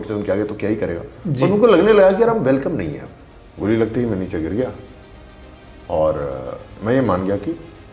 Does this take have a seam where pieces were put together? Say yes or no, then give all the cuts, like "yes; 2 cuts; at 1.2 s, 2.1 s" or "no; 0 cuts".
yes; 1 cut; at 3.5 s